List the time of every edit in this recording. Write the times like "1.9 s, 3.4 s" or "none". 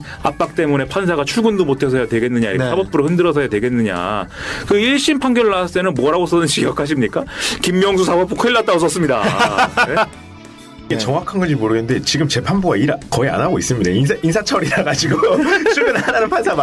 10.8 s